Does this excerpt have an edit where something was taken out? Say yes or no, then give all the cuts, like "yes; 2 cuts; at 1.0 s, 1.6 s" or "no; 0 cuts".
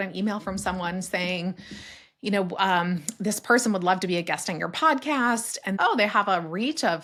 no; 0 cuts